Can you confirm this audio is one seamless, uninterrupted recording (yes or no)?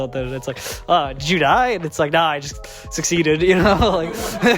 yes